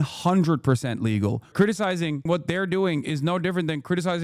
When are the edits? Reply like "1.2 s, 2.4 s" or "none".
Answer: 1.5 s